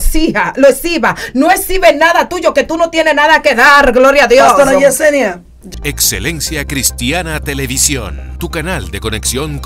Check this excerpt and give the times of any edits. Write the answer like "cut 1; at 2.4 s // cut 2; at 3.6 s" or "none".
cut 1; at 5.5 s